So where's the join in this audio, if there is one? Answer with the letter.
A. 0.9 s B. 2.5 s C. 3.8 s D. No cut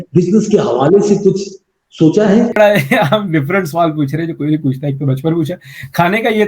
B